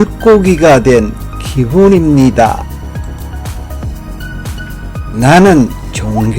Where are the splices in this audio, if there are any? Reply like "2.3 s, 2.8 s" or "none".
2.9 s, 5.1 s